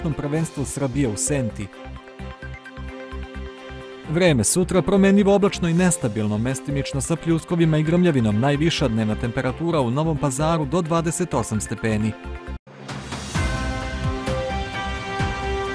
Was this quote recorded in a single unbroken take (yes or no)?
no